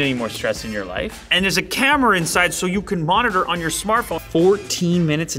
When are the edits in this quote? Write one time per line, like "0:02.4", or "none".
0:01.3
0:04.2